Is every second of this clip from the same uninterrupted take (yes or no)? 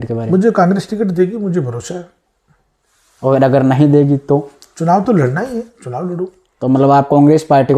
yes